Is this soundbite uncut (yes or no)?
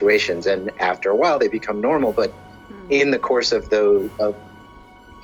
yes